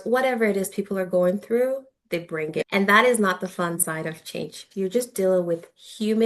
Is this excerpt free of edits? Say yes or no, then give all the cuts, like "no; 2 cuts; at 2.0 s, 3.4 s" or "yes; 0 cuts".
no; 1 cut; at 4.6 s